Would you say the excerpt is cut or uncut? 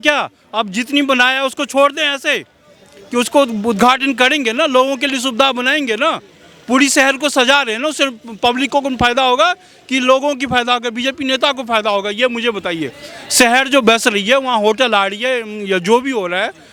uncut